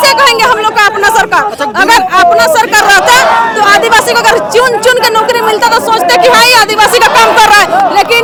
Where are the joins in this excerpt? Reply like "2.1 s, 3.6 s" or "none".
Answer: none